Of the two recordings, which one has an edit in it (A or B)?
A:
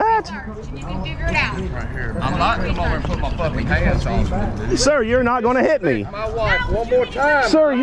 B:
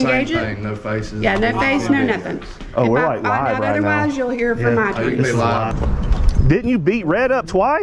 B